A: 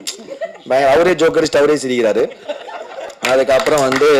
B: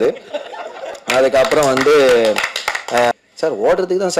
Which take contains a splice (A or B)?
B